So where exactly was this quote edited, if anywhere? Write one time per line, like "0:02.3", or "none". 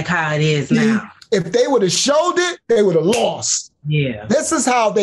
none